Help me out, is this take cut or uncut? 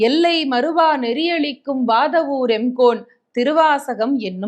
uncut